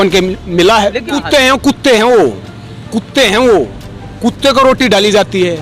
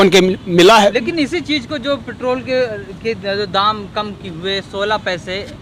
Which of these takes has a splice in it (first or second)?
first